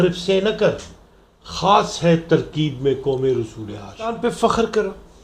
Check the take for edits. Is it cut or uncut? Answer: cut